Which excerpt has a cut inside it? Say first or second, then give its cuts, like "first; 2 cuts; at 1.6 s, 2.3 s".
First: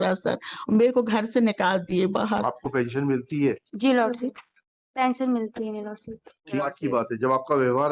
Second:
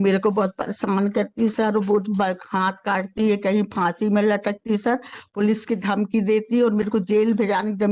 first; 1 cut; at 6.6 s